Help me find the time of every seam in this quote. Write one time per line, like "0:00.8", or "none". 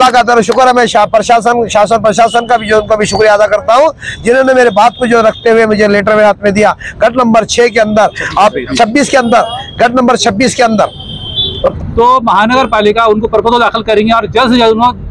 0:11.7